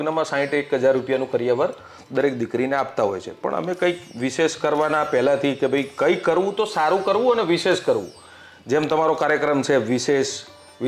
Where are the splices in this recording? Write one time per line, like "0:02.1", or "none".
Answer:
none